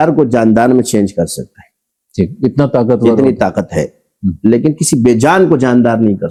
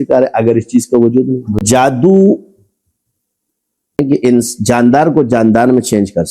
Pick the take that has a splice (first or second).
second